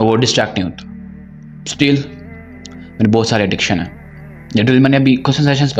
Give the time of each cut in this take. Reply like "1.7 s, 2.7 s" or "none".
none